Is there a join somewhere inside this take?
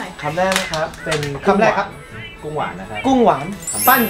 no; 0 cuts

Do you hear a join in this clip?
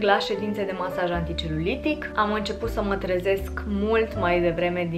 no; 0 cuts

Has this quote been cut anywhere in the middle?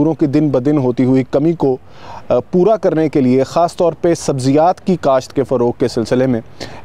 no; 0 cuts

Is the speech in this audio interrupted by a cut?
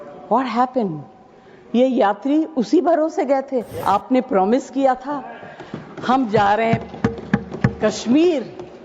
yes; 1 cut; at 3.7 s

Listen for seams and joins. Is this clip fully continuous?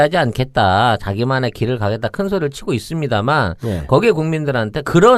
no; 1 cut; at 3.0 s

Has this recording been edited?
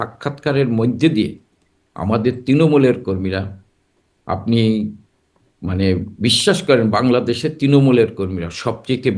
no; 0 cuts

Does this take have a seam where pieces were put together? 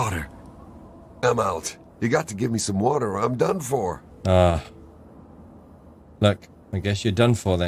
yes; 3 cuts; at 1.8 s, 4.1 s, 6.5 s

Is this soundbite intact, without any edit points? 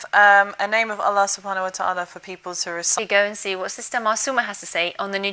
yes; 0 cuts

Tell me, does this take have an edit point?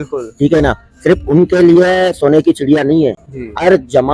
no; 0 cuts

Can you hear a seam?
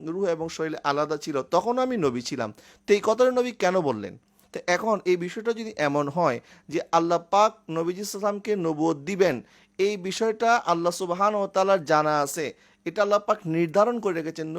no; 0 cuts

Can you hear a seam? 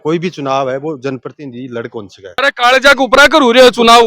yes; 1 cut; at 2.3 s

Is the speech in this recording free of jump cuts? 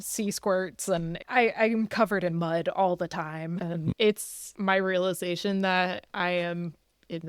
no; 2 cuts; at 1.2 s, 4.0 s

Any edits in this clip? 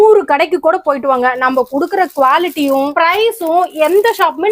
no; 0 cuts

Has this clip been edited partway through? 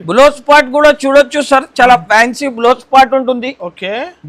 no; 0 cuts

